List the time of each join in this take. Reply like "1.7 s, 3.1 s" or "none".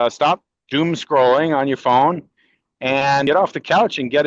3.2 s